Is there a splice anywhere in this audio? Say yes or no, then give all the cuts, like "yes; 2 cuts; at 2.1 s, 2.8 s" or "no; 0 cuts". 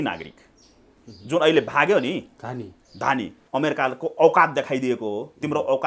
yes; 1 cut; at 3.4 s